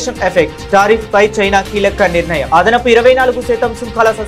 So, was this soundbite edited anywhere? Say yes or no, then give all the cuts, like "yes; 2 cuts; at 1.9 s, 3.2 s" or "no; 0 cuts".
no; 0 cuts